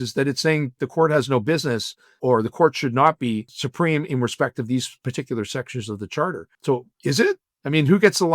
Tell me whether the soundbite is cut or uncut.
cut